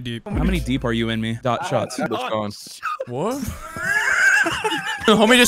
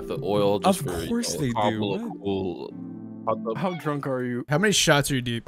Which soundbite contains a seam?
second; 1 cut; at 2.8 s

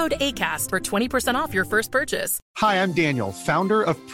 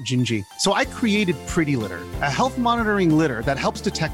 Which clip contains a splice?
first; 1 cut; at 2.4 s

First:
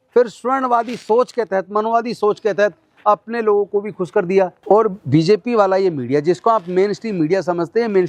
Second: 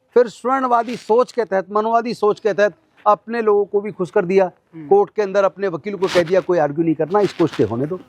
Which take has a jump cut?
first; 1 cut; at 4.6 s

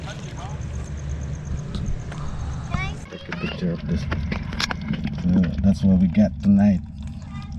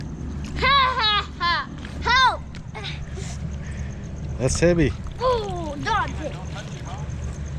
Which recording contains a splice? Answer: first; 1 cut; at 3.0 s

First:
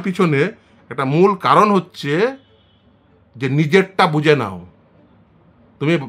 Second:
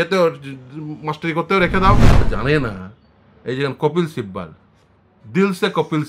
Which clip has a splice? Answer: second; 1 cut; at 2.3 s

